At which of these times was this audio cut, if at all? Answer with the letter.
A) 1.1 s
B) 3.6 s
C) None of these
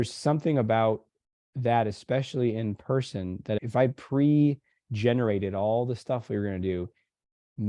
B